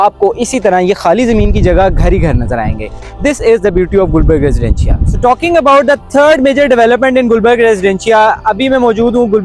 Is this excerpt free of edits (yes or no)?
yes